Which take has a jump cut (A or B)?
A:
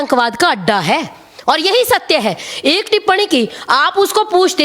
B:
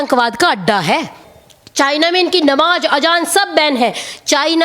B